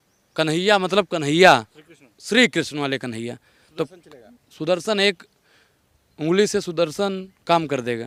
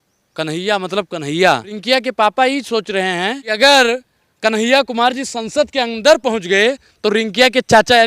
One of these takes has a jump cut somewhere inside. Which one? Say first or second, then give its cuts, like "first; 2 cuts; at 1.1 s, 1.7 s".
second; 2 cuts; at 1.7 s, 3.5 s